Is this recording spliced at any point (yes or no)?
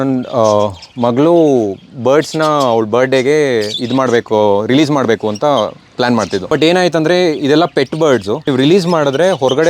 yes